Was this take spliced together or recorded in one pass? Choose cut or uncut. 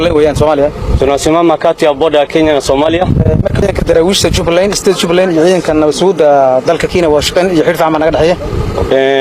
cut